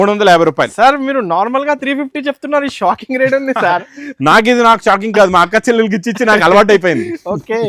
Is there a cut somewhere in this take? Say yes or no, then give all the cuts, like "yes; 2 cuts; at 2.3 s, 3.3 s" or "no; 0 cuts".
no; 0 cuts